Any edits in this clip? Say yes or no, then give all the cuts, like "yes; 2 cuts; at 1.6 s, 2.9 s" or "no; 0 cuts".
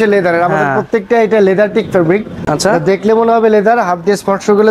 no; 0 cuts